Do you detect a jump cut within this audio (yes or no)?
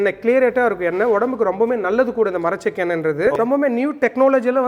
yes